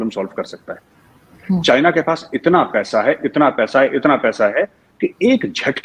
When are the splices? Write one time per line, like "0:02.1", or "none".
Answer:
none